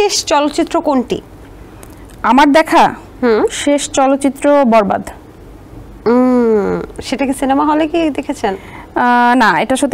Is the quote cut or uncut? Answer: uncut